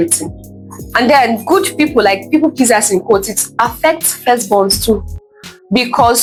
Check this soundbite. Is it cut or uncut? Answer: uncut